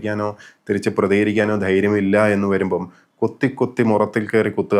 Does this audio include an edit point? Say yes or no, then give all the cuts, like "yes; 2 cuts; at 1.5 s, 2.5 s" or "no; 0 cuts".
no; 0 cuts